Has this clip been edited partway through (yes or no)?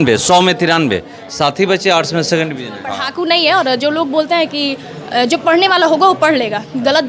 yes